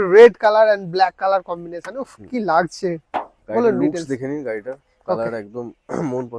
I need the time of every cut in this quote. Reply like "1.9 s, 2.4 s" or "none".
none